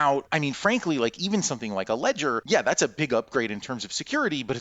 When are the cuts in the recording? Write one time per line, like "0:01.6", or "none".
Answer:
0:02.4
0:03.7